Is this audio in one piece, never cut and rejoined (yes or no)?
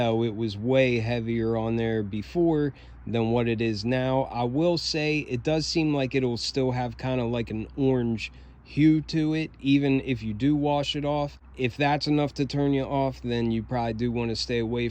no